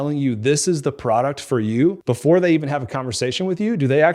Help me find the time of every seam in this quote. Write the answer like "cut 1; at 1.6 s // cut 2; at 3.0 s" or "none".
cut 1; at 2.0 s